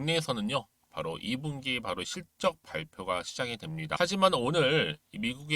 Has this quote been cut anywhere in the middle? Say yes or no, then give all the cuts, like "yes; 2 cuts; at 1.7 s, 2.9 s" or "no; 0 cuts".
yes; 1 cut; at 4.0 s